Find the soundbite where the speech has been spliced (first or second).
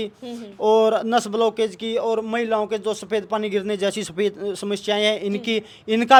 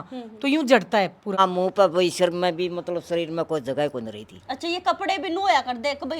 second